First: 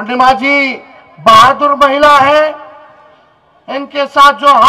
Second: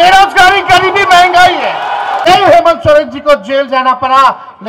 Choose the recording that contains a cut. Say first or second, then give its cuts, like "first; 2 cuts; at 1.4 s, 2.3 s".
second; 1 cut; at 2.2 s